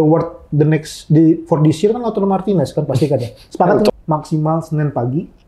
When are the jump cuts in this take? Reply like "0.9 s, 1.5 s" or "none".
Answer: 3.9 s